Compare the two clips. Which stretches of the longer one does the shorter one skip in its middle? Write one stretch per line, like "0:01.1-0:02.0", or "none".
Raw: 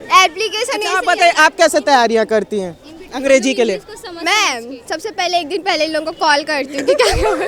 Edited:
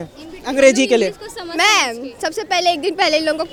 none